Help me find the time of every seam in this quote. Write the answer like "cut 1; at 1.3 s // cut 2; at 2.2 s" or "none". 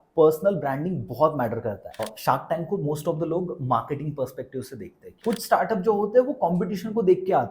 cut 1; at 2.0 s // cut 2; at 5.2 s